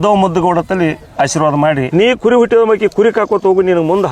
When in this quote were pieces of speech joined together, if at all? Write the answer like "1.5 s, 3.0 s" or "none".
1.9 s

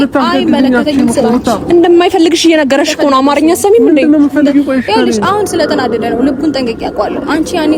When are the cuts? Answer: none

